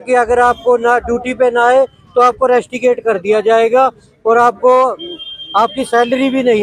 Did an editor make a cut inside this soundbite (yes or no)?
no